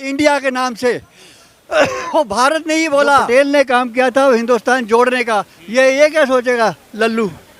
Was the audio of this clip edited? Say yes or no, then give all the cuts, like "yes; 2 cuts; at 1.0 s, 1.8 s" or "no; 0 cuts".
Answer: yes; 1 cut; at 3.3 s